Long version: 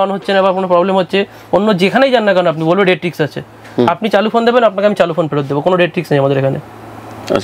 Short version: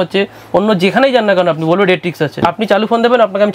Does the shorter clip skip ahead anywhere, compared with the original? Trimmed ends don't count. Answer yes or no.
yes